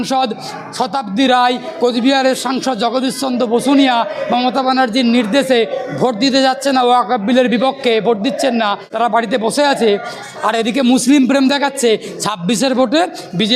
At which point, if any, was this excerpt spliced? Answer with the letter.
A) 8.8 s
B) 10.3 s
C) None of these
A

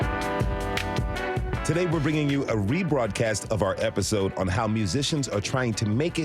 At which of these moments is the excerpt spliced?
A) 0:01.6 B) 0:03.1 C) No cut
A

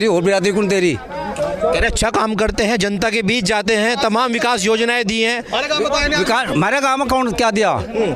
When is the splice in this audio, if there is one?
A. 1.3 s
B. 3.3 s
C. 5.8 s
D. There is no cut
D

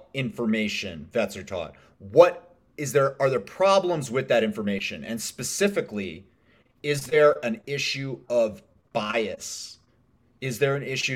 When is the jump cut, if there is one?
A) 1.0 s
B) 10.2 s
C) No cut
A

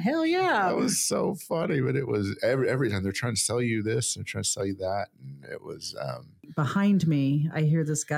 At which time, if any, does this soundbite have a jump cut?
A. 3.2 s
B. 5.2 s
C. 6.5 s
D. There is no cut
C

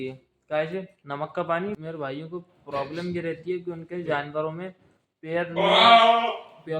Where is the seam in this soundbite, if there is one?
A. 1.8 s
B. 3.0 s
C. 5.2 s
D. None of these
A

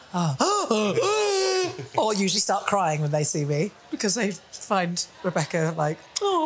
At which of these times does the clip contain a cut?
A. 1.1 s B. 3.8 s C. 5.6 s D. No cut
B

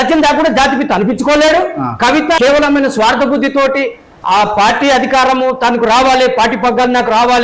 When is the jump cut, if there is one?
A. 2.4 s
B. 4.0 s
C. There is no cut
A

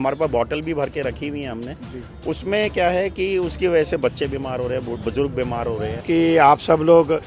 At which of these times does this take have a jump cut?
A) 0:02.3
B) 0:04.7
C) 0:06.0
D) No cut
C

